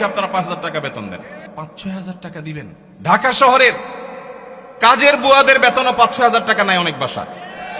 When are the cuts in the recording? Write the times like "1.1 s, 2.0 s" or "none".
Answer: 1.4 s, 2.8 s